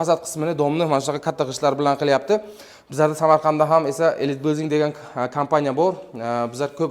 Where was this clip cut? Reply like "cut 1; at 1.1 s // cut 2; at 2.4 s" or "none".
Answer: none